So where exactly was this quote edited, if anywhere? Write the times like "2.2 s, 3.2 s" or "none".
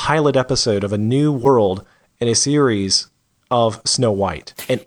1.4 s

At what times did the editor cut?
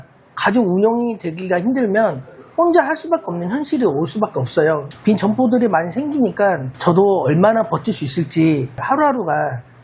4.9 s

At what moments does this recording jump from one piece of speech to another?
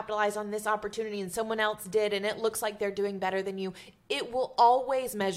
none

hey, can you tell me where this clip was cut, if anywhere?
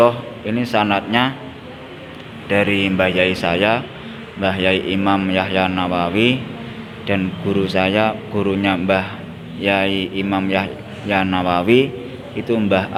none

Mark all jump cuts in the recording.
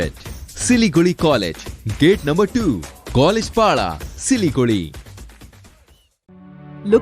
none

